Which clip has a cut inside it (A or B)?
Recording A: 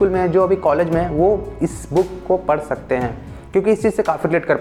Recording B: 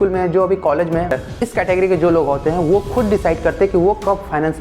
B